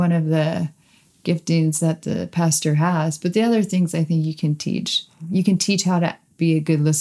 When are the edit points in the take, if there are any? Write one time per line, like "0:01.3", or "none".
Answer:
0:05.2